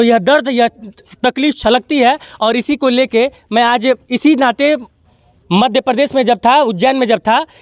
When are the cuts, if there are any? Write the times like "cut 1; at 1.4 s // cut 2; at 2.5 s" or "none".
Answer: none